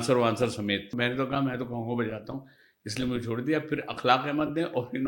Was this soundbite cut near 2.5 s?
no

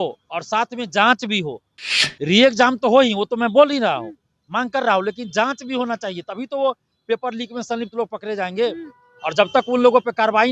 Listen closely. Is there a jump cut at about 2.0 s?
yes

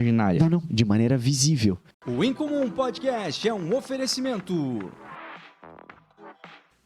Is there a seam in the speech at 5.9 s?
no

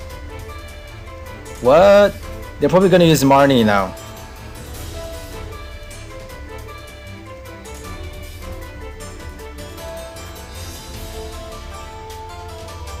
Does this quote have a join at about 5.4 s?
no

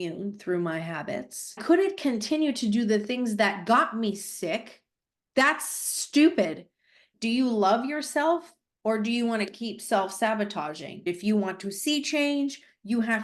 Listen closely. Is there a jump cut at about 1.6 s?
yes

